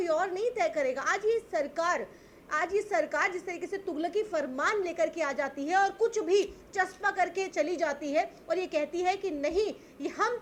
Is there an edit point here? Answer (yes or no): no